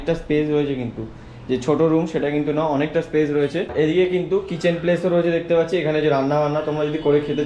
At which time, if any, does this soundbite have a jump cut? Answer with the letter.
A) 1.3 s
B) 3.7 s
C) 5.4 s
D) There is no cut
B